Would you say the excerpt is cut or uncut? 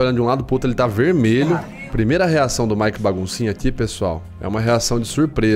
cut